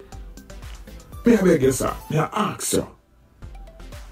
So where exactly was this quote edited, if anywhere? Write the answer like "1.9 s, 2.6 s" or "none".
1.1 s